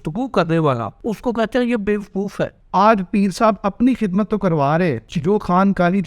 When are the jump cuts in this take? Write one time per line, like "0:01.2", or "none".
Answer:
0:00.9
0:02.6
0:05.1